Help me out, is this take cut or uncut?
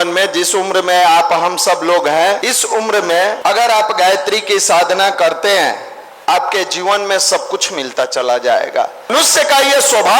cut